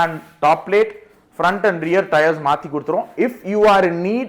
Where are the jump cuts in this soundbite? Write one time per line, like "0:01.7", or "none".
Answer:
none